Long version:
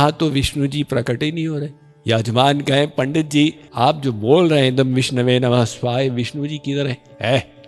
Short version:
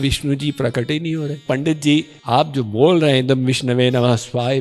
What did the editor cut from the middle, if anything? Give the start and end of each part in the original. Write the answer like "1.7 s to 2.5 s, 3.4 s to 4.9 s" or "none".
1.7 s to 2.9 s